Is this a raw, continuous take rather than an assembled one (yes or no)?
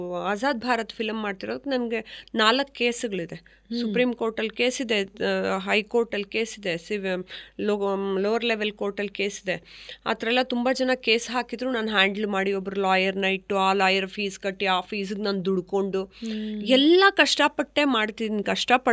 yes